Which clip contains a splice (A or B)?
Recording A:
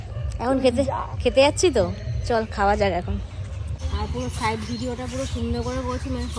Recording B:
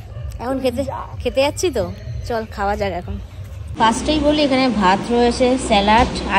A